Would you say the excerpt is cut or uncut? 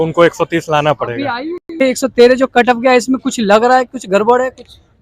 cut